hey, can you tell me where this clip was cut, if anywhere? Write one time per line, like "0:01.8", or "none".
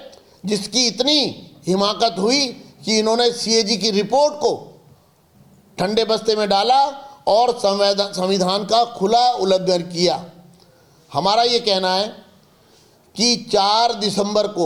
none